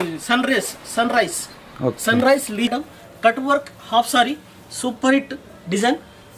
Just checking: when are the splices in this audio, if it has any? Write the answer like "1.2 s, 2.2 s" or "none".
2.7 s

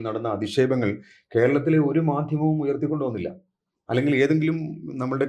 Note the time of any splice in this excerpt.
none

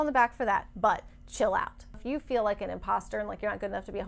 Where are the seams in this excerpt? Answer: 2.0 s

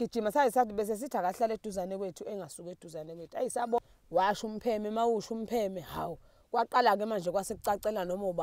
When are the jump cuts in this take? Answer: 3.8 s

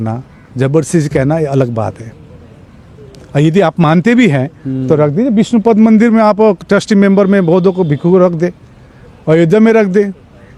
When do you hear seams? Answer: none

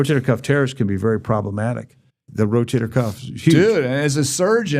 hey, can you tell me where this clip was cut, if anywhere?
2.2 s

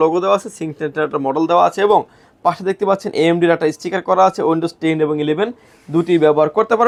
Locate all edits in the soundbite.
none

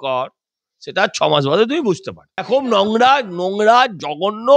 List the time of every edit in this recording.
2.3 s

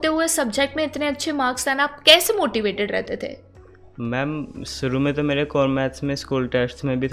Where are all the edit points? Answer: none

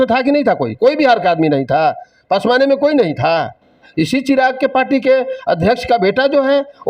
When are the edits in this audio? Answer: 3.8 s

